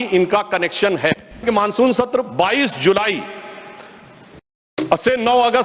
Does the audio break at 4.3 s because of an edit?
no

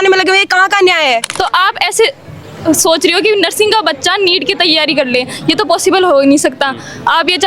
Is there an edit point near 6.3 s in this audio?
no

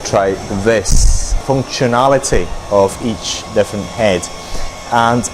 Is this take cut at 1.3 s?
yes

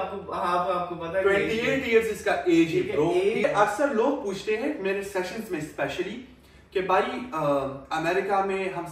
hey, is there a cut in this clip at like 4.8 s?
no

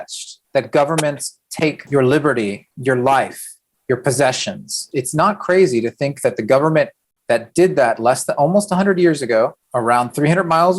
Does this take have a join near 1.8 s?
yes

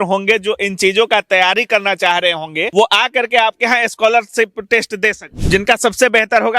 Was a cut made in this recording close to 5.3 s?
yes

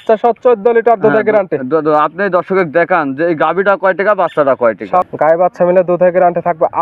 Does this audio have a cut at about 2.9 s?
no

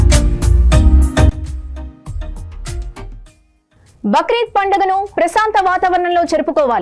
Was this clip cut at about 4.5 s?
no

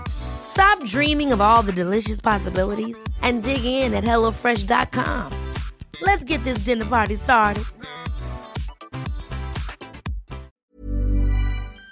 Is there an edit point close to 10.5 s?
yes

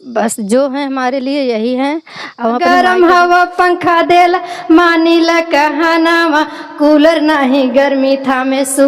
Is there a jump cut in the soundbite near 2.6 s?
yes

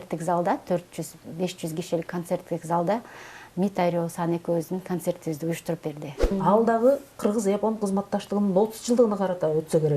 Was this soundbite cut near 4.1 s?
no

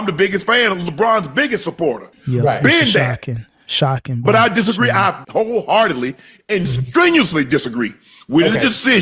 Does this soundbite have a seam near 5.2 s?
yes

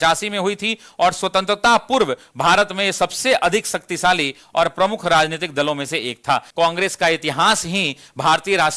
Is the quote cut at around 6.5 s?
yes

